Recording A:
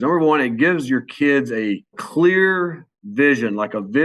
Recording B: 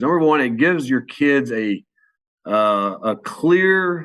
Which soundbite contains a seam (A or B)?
A